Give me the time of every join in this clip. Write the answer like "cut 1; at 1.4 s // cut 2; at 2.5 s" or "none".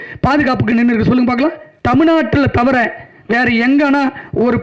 cut 1; at 1.7 s